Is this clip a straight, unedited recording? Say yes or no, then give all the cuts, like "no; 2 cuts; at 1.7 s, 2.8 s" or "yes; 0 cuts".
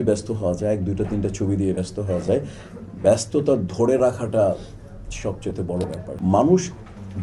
no; 1 cut; at 6.0 s